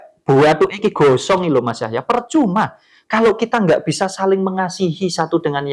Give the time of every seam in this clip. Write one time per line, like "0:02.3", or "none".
none